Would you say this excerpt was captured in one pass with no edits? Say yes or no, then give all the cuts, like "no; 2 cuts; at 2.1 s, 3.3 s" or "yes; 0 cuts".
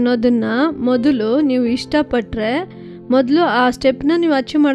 yes; 0 cuts